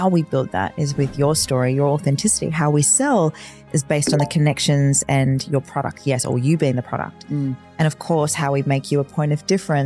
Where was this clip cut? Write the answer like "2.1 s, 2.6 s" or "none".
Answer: none